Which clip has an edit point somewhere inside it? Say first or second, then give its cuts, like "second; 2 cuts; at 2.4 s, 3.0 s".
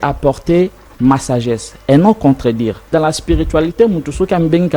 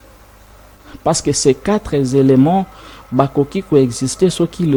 first; 1 cut; at 2.9 s